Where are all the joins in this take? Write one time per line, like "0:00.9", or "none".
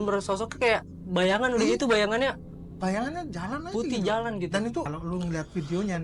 0:04.9